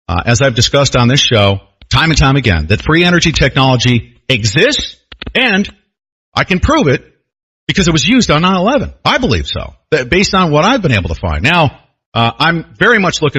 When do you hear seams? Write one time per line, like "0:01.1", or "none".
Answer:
0:06.5